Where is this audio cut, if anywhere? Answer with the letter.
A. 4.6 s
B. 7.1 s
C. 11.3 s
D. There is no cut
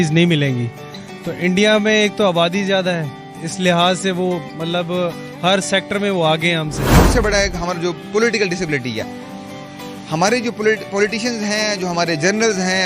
B